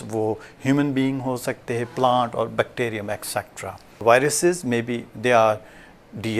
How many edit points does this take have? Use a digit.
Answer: 1